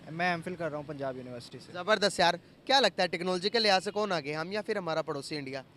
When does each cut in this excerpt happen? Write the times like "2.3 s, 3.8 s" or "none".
none